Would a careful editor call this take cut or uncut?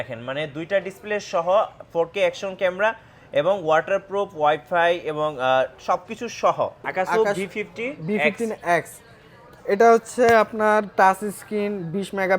cut